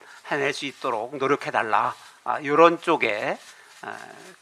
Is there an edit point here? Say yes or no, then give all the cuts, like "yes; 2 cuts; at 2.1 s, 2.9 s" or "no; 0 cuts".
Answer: no; 0 cuts